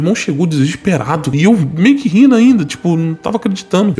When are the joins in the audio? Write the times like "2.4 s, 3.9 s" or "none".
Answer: 1.3 s